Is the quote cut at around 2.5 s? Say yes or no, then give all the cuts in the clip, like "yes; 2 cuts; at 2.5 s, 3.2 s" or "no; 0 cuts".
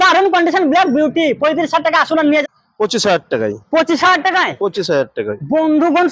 yes; 1 cut; at 2.5 s